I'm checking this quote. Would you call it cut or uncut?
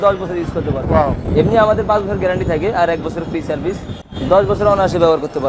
uncut